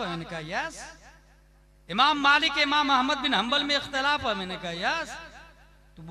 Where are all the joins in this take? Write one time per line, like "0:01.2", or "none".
none